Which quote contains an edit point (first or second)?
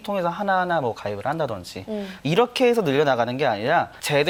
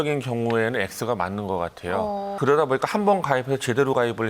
second